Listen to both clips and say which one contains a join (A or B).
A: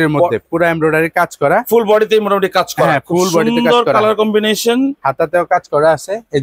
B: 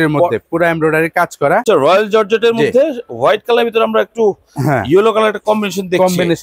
B